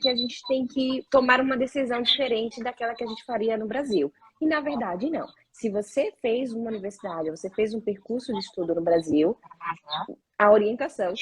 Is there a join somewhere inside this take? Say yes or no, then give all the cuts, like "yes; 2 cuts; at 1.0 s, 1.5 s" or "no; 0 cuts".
yes; 1 cut; at 1.0 s